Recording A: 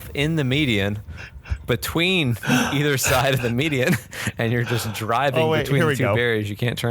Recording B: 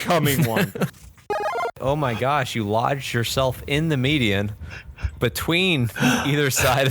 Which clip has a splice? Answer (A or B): B